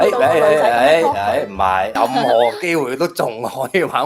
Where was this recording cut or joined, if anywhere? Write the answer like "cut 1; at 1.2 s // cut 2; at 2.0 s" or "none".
cut 1; at 1.9 s